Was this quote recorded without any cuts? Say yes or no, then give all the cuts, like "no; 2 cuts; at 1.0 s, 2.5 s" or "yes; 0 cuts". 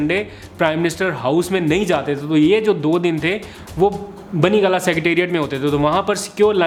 yes; 0 cuts